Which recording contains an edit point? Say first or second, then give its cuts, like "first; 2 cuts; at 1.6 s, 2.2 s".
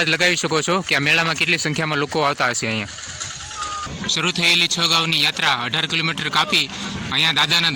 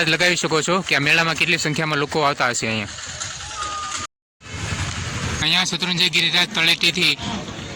first; 1 cut; at 3.9 s